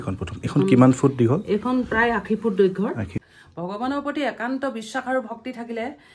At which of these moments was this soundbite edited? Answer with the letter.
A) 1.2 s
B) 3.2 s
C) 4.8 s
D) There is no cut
B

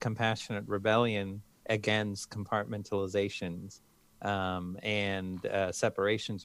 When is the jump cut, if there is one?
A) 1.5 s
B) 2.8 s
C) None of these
A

